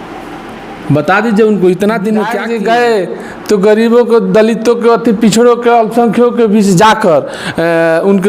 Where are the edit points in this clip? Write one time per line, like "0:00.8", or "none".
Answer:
0:02.4